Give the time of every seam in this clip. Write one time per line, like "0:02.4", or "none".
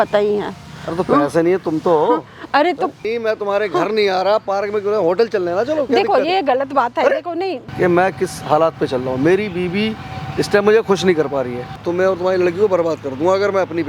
0:03.0
0:07.6
0:11.8